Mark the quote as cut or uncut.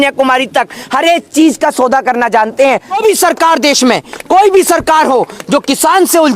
cut